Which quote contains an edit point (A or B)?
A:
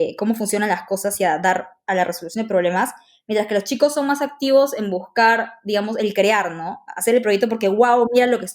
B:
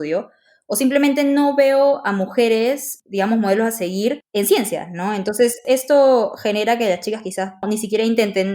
B